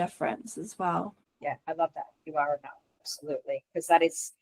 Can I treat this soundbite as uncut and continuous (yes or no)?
no